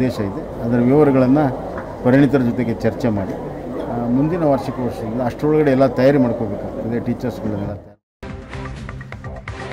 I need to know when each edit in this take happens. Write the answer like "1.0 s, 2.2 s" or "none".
8.2 s